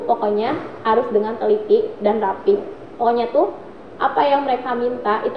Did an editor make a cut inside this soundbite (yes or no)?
no